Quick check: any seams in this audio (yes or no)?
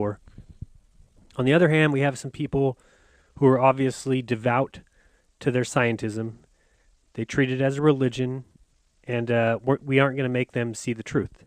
yes